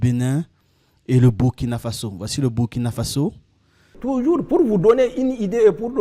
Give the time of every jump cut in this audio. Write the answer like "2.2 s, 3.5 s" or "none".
3.9 s

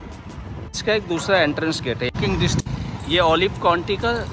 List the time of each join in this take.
2.2 s

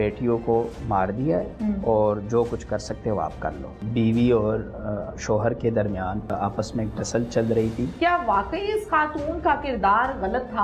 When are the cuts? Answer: 3.8 s, 6.3 s, 7.9 s

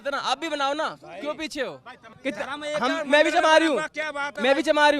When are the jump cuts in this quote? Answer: 2.0 s

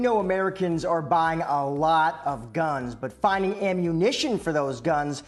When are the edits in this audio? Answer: none

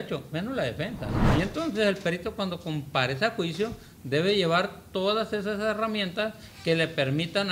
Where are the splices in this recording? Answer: 1.2 s

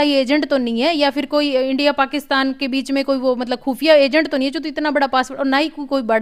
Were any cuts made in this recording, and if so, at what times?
none

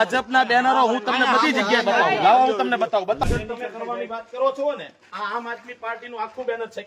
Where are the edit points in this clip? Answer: 3.2 s

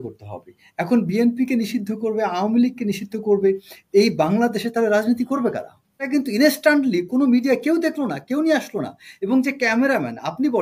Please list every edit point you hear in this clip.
6.0 s

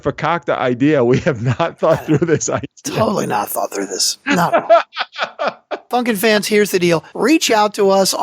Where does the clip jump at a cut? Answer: 5.9 s, 7.1 s

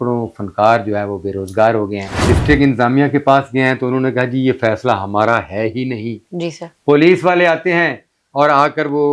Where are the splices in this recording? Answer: 2.1 s

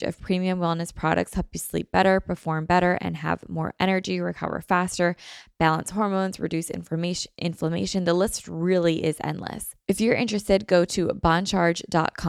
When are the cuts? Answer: 9.7 s

